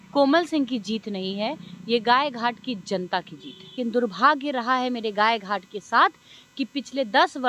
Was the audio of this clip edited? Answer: yes; 1 cut; at 3.7 s

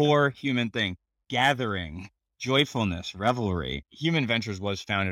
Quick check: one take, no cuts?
no; 1 cut; at 3.8 s

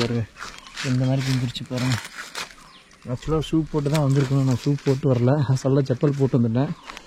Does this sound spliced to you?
no; 0 cuts

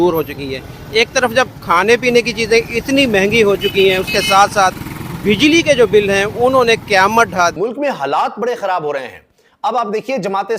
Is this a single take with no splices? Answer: no; 1 cut; at 7.6 s

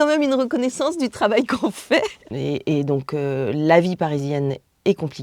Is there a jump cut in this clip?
yes; 1 cut; at 2.2 s

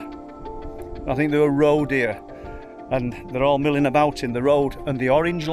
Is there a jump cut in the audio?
no; 0 cuts

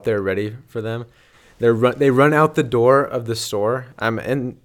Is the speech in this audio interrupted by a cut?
yes; 1 cut; at 1.3 s

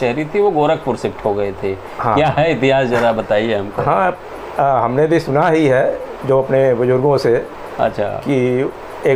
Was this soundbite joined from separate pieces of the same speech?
no; 0 cuts

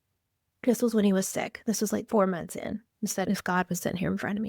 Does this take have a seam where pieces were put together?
yes; 2 cuts; at 2.1 s, 3.2 s

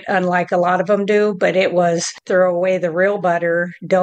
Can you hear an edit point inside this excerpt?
yes; 1 cut; at 2.1 s

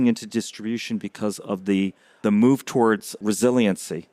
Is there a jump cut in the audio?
yes; 2 cuts; at 2.2 s, 3.2 s

